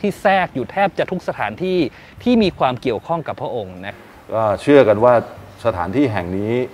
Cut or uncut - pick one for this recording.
cut